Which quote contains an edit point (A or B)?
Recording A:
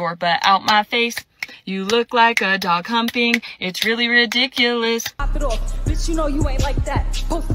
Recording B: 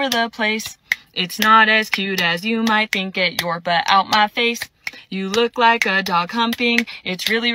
A